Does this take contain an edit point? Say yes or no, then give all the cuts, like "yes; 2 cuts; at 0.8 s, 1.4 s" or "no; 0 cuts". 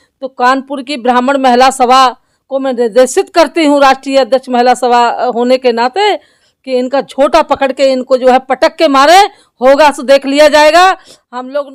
no; 0 cuts